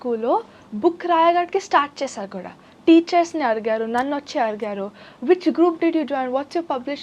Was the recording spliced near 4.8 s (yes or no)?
no